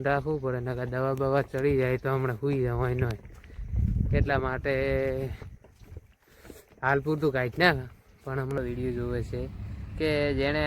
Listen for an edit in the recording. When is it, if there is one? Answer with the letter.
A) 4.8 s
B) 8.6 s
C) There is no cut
B